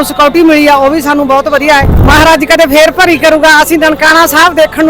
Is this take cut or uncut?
cut